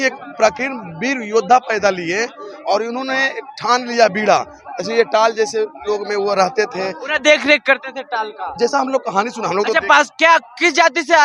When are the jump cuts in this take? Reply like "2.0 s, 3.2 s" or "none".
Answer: none